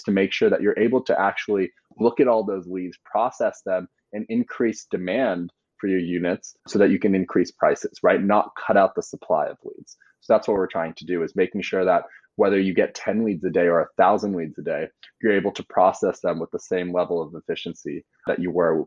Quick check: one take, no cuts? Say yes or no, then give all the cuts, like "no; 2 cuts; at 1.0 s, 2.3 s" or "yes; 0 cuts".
yes; 0 cuts